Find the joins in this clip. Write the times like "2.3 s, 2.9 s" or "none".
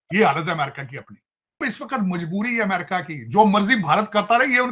1.6 s

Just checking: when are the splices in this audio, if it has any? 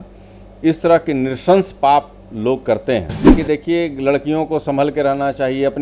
3.3 s

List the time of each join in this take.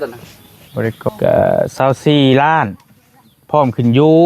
1.1 s

